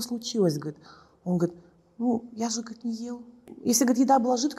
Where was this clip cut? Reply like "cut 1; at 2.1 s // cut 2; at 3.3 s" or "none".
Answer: cut 1; at 3.4 s

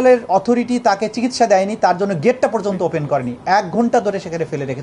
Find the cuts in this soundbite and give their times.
none

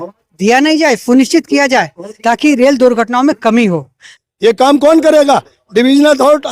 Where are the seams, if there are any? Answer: cut 1; at 4.1 s

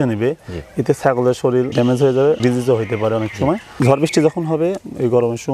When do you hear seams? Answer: cut 1; at 1.7 s // cut 2; at 2.4 s // cut 3; at 3.7 s

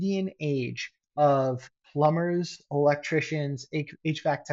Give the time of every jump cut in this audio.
none

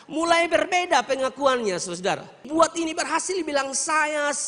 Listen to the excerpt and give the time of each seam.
cut 1; at 2.4 s

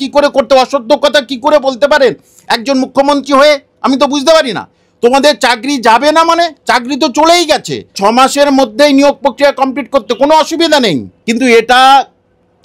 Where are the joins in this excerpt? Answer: cut 1; at 8.0 s // cut 2; at 11.1 s

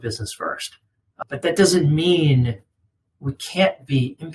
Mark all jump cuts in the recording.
cut 1; at 1.0 s

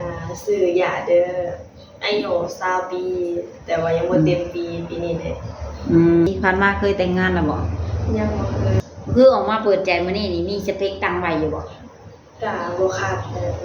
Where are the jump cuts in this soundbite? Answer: cut 1; at 6.3 s // cut 2; at 8.8 s

